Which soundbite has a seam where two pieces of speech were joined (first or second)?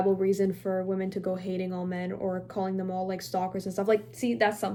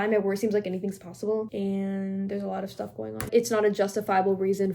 second